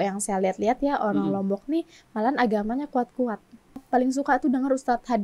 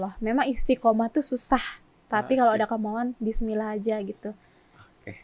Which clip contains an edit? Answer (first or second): first